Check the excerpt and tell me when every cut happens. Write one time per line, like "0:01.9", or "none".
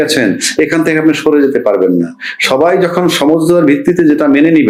none